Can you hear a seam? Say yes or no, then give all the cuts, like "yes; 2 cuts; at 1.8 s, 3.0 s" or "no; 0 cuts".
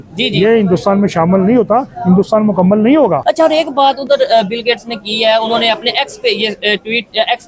yes; 1 cut; at 3.2 s